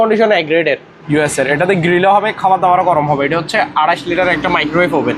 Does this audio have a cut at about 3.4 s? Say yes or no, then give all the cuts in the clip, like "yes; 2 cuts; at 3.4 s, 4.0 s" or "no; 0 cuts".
no; 1 cut; at 0.9 s